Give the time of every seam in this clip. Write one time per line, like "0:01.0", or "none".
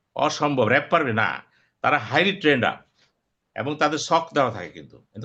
none